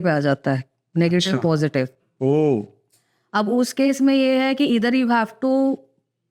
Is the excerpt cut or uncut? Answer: uncut